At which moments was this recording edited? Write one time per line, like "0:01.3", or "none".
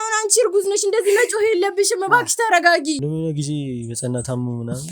0:03.0